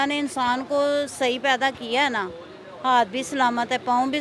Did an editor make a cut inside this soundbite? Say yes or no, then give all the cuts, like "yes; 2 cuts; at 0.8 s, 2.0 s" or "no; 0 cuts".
no; 0 cuts